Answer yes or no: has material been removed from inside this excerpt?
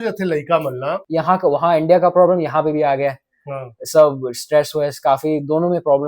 yes